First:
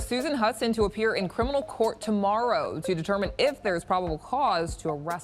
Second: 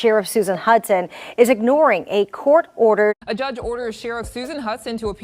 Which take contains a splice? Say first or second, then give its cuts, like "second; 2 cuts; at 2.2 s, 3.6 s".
second; 1 cut; at 3.2 s